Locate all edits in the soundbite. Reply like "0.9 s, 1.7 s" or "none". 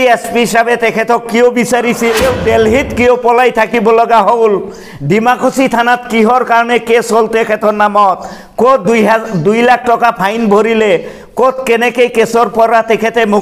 2.2 s